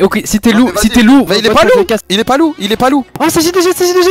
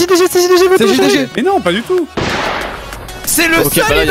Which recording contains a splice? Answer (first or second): second